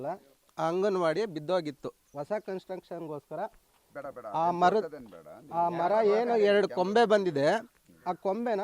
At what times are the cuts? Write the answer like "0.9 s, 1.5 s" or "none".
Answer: none